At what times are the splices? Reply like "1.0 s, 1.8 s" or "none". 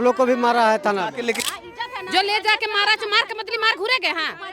1.4 s